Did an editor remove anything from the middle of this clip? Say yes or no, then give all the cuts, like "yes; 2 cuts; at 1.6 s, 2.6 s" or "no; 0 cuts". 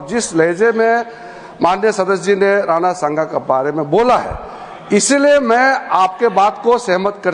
no; 0 cuts